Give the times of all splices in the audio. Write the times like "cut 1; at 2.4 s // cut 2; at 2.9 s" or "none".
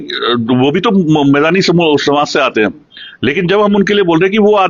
none